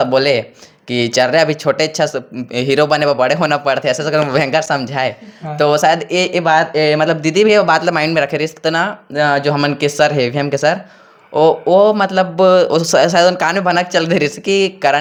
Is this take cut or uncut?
uncut